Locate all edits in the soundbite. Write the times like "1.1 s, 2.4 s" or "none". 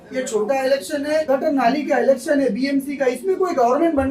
1.3 s

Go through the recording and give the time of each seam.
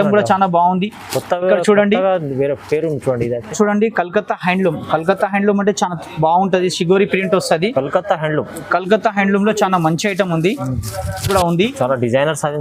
3.5 s, 11.3 s

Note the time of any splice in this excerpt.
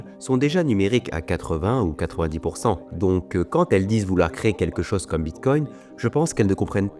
none

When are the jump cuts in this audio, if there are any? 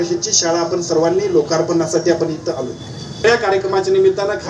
3.2 s

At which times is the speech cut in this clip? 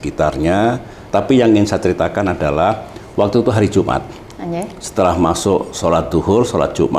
0.9 s

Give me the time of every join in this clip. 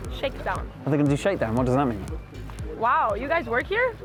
none

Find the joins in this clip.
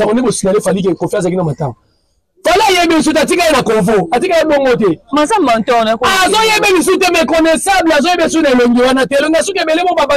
none

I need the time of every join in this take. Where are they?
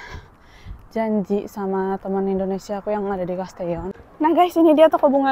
3.9 s

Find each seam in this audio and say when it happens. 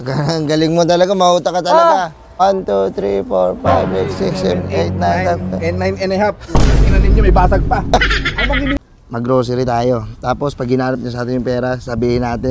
2.4 s, 8.8 s

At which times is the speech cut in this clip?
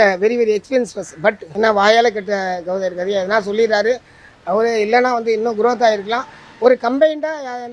none

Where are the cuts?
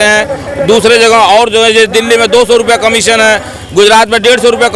none

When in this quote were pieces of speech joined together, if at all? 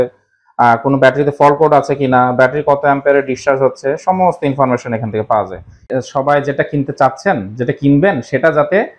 5.9 s

